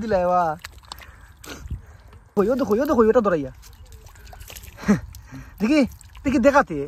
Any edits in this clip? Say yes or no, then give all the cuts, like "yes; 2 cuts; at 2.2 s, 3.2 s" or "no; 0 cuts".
yes; 1 cut; at 2.3 s